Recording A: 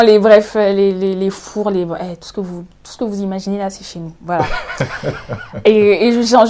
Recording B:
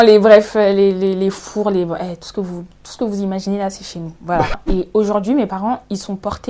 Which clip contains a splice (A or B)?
B